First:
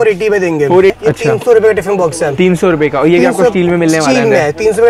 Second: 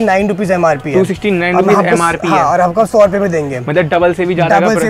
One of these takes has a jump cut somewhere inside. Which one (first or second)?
first